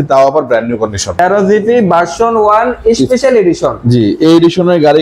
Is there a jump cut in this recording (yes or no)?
yes